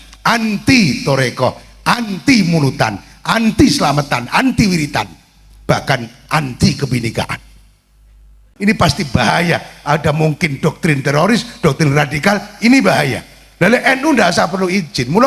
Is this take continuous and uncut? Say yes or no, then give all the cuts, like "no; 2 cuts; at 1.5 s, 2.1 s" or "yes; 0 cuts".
no; 1 cut; at 8.5 s